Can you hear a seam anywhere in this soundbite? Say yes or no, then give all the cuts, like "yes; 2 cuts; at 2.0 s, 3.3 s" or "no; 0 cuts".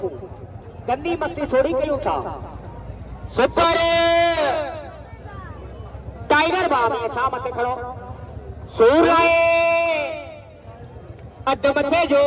no; 0 cuts